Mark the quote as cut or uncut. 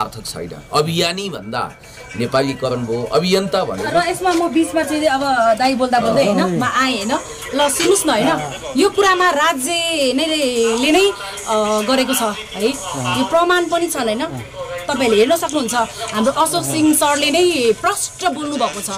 uncut